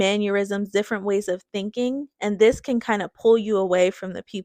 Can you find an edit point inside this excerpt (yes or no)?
no